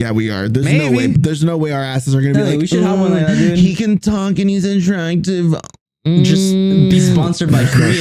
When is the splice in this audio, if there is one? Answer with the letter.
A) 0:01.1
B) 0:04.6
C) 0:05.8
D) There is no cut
A